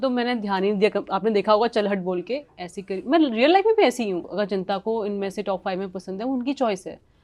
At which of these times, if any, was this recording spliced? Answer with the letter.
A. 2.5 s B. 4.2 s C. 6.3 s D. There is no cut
B